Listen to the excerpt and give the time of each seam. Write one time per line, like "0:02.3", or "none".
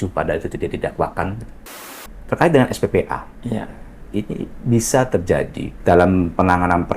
0:01.9
0:05.6